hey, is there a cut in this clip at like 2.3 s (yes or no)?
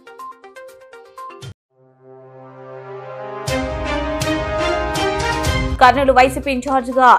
no